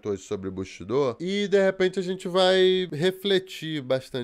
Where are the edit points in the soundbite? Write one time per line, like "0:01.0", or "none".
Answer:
0:01.2
0:02.9